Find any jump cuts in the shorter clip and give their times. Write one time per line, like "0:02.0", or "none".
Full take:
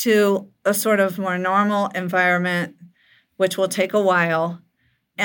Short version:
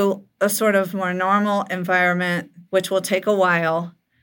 0:02.5